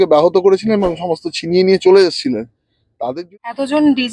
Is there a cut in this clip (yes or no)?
yes